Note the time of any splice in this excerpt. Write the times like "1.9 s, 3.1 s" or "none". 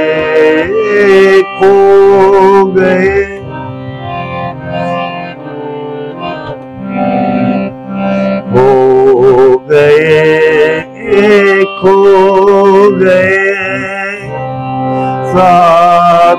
none